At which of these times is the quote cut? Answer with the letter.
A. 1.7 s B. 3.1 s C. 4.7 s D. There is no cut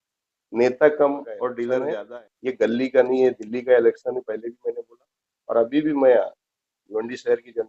A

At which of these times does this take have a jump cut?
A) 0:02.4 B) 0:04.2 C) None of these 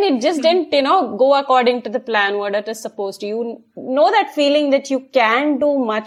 C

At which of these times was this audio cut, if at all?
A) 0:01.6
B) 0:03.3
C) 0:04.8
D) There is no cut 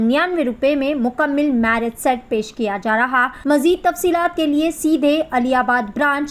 B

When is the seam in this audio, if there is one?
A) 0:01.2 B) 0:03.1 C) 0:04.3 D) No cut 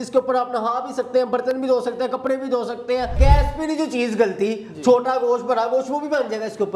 B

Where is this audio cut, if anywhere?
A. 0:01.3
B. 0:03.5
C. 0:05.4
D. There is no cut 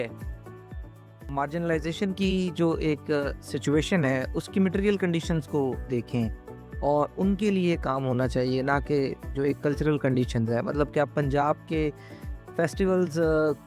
A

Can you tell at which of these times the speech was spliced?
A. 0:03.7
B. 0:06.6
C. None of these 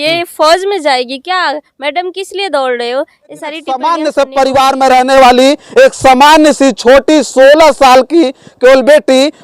A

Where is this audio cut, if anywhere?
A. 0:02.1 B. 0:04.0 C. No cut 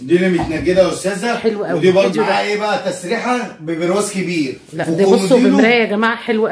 A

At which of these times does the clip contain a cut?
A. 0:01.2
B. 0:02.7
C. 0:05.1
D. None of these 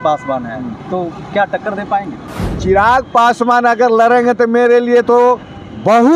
D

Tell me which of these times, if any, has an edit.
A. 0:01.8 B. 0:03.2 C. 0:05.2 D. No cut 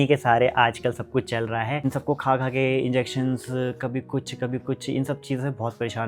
A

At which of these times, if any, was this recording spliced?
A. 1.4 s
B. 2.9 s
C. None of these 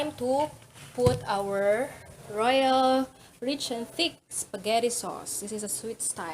C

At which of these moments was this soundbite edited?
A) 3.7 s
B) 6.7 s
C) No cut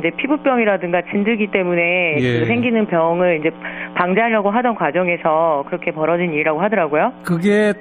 C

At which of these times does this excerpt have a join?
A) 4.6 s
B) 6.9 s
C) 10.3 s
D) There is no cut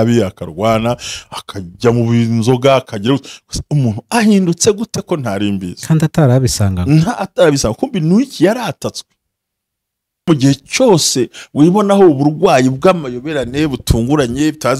C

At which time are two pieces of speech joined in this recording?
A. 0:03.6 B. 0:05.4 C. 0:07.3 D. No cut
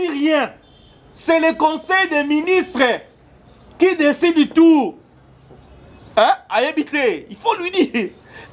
D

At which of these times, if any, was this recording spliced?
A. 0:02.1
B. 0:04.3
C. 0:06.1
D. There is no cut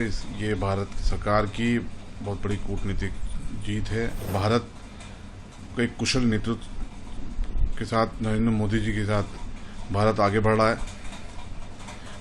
B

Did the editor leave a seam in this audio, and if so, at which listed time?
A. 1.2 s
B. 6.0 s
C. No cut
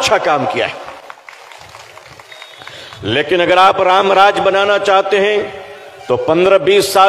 A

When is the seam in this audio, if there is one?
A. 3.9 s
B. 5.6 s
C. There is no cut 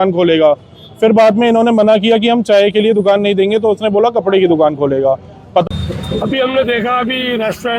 B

